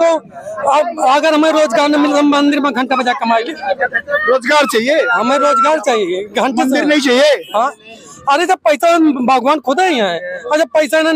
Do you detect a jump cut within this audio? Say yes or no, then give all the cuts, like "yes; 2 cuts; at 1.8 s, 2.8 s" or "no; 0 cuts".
no; 0 cuts